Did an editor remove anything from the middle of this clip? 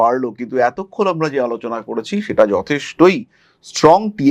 no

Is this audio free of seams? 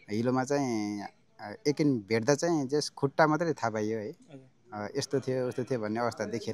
yes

